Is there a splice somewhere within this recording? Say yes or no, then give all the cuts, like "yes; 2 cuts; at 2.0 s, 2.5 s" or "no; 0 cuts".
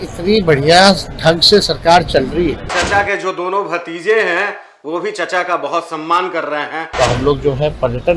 yes; 2 cuts; at 2.8 s, 6.8 s